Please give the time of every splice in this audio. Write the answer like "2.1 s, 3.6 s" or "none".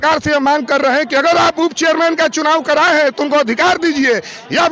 none